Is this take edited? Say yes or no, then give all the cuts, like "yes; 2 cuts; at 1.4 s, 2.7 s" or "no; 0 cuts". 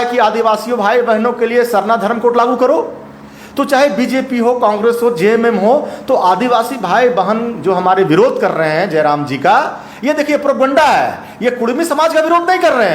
no; 0 cuts